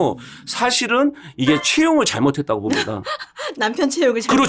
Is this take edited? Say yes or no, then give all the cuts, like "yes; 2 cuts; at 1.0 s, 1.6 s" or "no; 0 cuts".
no; 0 cuts